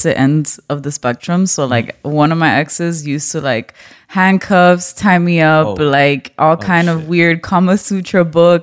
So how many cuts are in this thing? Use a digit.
0